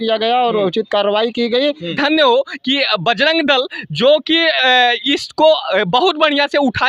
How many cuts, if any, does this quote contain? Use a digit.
1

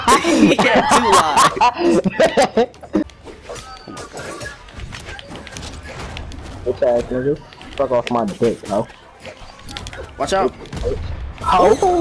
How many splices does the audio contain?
1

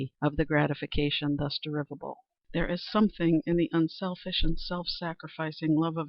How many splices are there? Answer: 1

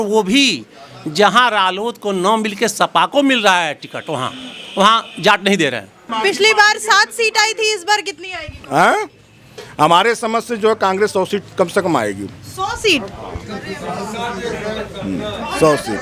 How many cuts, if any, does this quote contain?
1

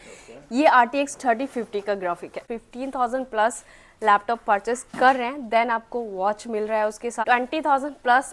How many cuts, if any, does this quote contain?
2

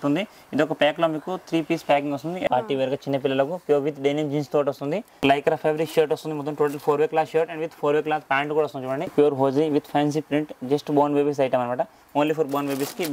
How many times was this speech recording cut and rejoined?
3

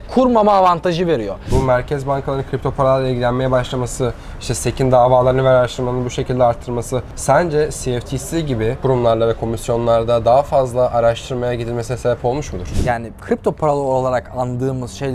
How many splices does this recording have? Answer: 4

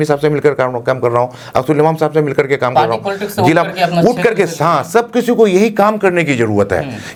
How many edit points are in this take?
0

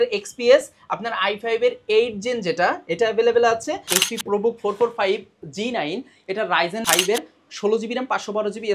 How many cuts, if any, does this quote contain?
2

